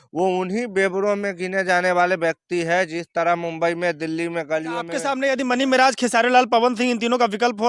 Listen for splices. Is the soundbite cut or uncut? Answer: cut